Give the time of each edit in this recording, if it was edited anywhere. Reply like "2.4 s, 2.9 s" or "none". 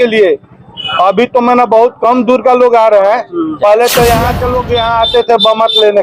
4.4 s